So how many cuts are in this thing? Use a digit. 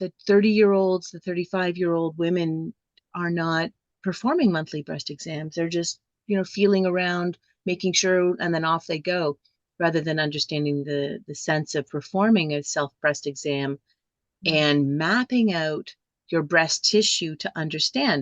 1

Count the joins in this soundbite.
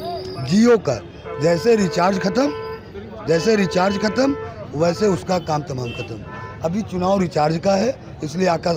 0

